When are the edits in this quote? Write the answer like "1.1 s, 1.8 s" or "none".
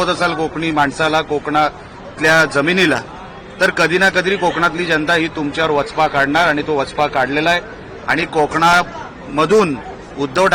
none